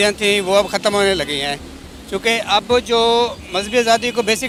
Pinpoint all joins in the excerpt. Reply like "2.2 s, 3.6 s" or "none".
none